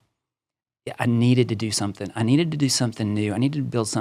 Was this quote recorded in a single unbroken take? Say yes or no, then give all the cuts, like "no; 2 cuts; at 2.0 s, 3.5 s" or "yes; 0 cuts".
yes; 0 cuts